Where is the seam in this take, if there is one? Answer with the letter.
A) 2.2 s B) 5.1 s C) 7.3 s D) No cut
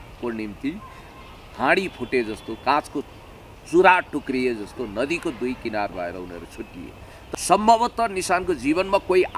C